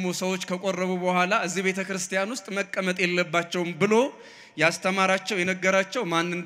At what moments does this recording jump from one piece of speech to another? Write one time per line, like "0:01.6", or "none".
none